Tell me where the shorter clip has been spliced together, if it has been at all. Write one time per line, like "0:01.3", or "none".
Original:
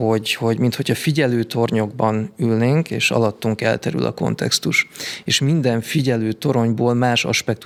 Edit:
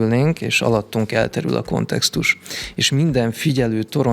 none

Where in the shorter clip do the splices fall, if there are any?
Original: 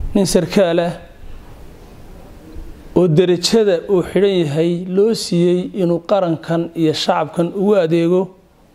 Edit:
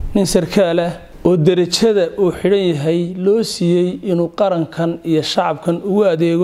0:01.0

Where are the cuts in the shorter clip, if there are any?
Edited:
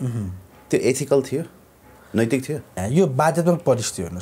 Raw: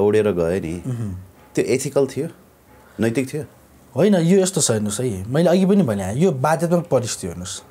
0:02.8

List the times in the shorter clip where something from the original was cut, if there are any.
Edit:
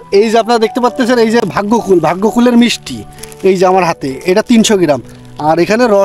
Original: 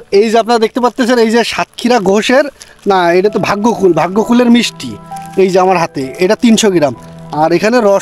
0:01.5

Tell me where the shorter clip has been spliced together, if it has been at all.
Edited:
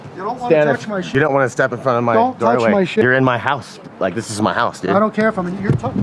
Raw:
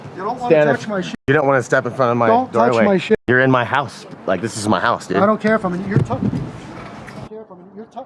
0:01.0
0:03.0

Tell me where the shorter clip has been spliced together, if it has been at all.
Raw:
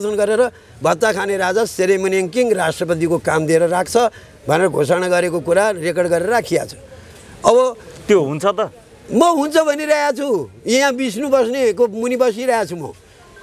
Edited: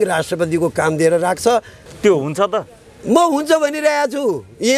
0:01.8

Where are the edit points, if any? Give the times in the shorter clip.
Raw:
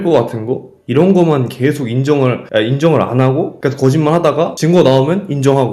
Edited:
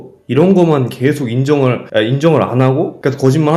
none

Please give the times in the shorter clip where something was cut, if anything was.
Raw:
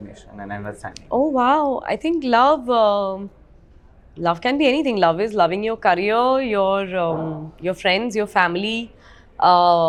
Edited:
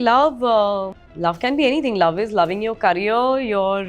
0:01.0

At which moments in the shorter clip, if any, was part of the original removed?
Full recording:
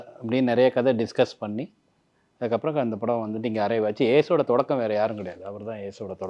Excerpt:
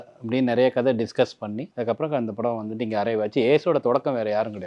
0:01.7

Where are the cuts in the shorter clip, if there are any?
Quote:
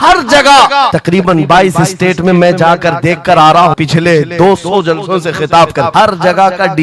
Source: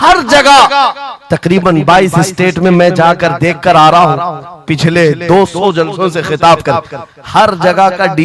0:01.0
0:03.8
0:05.9

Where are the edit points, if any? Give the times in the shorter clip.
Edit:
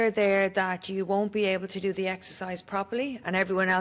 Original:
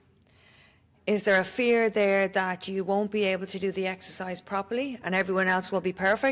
none

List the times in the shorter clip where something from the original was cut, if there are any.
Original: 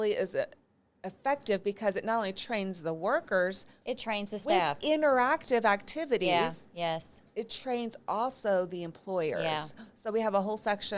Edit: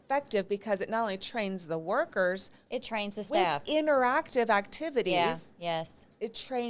none

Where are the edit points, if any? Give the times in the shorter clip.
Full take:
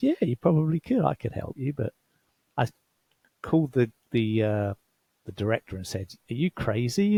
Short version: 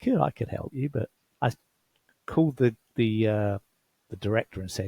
0:01.2

